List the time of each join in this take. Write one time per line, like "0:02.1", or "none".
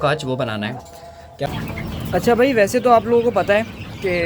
0:01.5